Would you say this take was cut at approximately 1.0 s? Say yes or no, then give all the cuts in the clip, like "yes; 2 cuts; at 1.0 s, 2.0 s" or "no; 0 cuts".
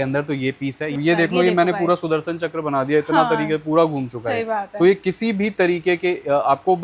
yes; 1 cut; at 1.0 s